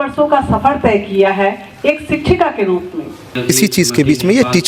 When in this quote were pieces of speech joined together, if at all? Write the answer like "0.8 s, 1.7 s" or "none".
3.3 s